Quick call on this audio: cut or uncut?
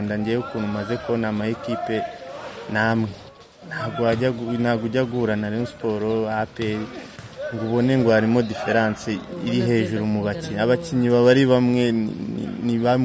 uncut